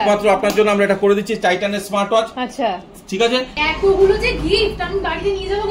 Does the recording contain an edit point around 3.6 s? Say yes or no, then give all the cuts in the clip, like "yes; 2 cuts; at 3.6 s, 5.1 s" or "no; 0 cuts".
yes; 1 cut; at 3.6 s